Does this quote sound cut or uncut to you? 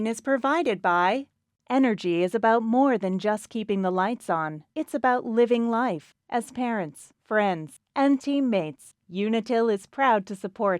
cut